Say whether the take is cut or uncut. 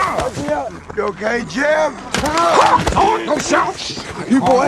cut